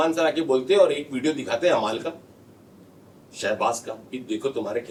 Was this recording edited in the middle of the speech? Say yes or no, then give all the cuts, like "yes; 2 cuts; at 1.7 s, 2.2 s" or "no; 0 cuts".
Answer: no; 0 cuts